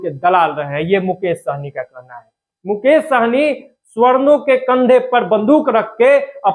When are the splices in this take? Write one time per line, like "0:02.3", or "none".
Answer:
none

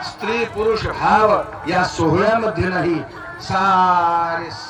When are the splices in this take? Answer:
none

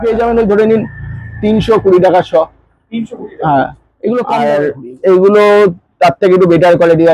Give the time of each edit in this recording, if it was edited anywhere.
0:04.3

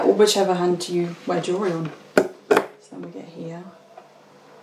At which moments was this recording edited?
none

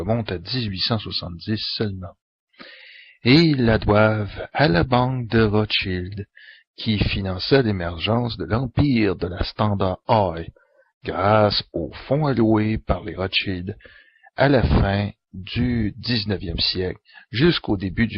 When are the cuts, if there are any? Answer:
0:08.7

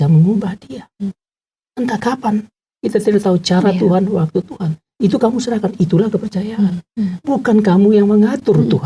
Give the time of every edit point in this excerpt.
none

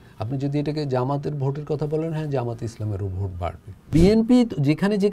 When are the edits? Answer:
0:03.9

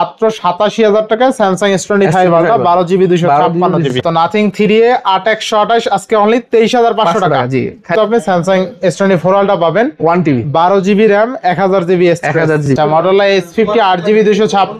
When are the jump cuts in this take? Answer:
0:04.0
0:07.9
0:12.7

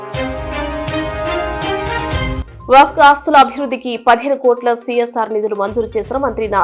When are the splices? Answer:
none

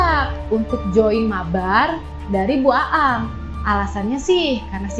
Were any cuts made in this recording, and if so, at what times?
none

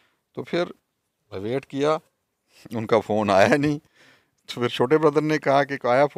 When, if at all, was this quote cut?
none

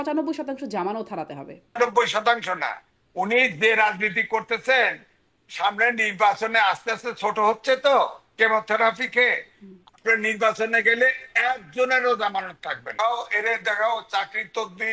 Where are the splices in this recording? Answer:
0:01.8
0:12.9

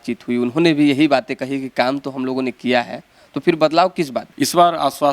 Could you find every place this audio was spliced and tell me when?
0:04.2

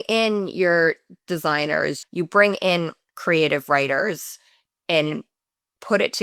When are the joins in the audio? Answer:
0:02.0

